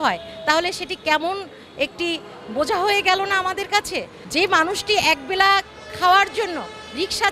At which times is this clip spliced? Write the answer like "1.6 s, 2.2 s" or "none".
4.2 s